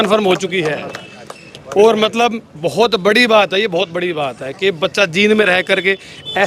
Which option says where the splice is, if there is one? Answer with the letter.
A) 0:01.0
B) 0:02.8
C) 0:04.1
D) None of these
D